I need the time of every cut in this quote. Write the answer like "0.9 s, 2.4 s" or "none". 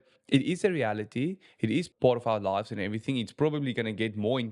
1.9 s